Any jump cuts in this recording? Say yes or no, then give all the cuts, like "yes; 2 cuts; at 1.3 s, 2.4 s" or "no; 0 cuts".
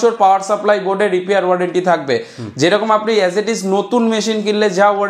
no; 0 cuts